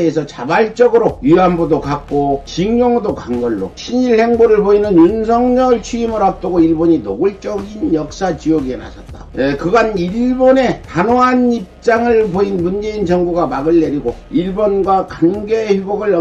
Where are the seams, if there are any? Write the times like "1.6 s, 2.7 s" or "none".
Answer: 1.2 s, 2.5 s, 3.8 s